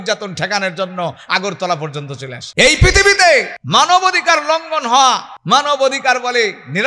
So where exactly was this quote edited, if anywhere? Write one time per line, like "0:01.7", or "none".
0:02.3
0:03.6
0:05.3